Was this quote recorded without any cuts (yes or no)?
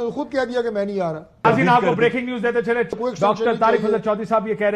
no